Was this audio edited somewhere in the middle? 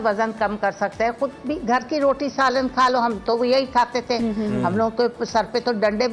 no; 0 cuts

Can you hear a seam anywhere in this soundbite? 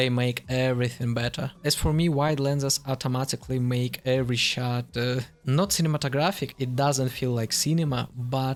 no; 0 cuts

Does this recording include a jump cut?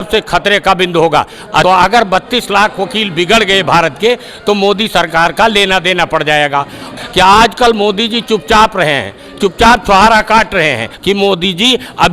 yes; 3 cuts; at 1.6 s, 6.9 s, 10.9 s

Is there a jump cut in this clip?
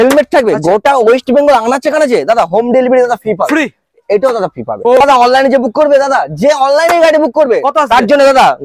yes; 1 cut; at 5.0 s

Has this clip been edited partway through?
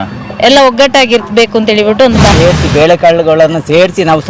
yes; 1 cut; at 2.3 s

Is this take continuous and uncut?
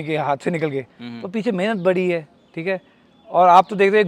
yes; 0 cuts

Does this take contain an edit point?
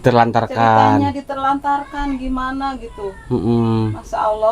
no; 0 cuts

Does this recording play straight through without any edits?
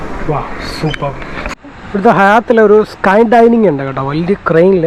no; 1 cut; at 1.5 s

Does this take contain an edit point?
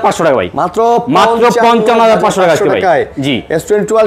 no; 0 cuts

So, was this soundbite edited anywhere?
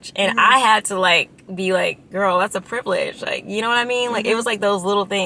no; 0 cuts

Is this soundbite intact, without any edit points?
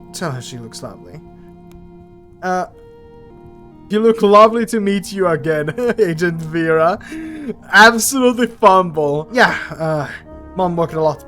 no; 2 cuts; at 3.9 s, 9.3 s

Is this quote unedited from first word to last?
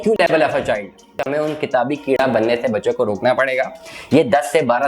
no; 1 cut; at 1.2 s

